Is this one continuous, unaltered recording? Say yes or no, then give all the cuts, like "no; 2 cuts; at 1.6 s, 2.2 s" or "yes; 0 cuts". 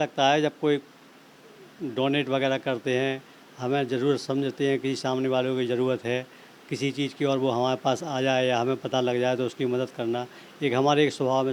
yes; 0 cuts